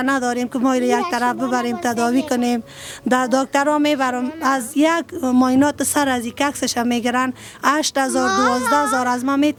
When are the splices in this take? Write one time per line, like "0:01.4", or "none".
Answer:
none